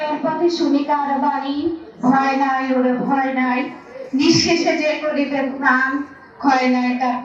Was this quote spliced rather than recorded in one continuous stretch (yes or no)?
no